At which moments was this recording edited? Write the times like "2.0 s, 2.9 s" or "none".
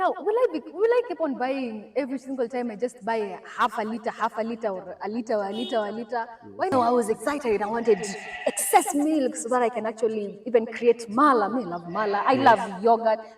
6.7 s